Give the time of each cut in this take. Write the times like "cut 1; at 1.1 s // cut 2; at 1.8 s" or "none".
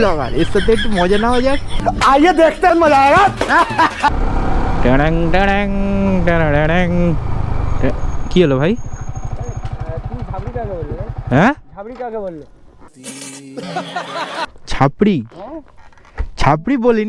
cut 1; at 1.7 s // cut 2; at 4.1 s